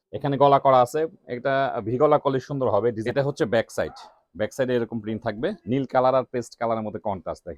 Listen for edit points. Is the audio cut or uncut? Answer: cut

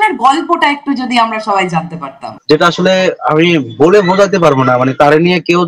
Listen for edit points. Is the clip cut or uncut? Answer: cut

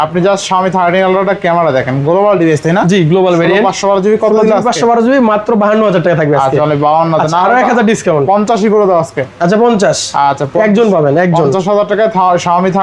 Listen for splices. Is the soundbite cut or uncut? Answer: uncut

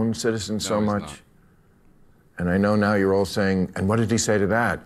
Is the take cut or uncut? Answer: uncut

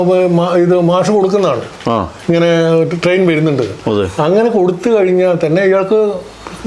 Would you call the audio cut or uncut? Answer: uncut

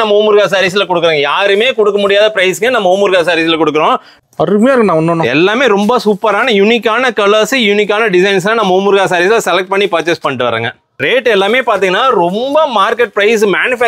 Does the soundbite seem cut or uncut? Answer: cut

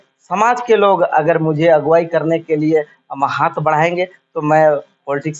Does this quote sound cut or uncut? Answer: uncut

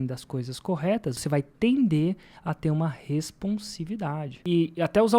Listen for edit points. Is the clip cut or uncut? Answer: cut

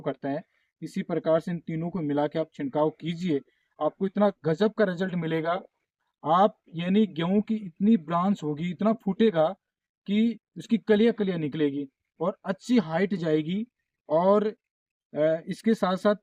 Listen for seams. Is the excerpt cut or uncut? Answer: uncut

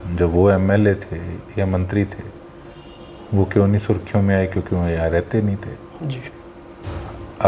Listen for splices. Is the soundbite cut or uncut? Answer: uncut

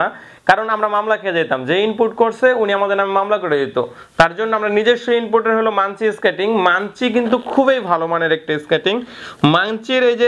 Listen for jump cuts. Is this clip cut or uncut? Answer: uncut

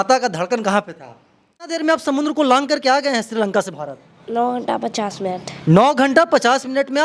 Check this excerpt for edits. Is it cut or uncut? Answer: cut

